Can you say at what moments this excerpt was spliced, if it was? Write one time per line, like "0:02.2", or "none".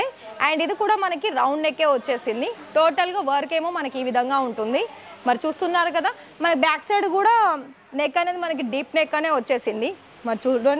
none